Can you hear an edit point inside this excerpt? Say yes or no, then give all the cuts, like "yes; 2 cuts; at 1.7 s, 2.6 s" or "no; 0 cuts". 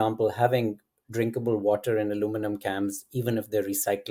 no; 0 cuts